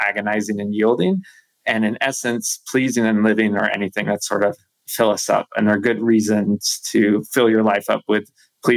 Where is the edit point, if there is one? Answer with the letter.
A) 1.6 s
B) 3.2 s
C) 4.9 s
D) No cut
D